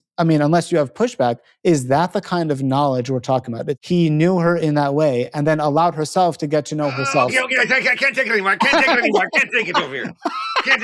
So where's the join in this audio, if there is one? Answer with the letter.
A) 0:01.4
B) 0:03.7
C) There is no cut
B